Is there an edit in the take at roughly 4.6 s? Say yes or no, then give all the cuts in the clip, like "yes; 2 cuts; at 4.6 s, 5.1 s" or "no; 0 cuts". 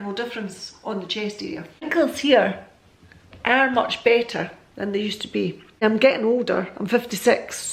no; 2 cuts; at 1.8 s, 5.8 s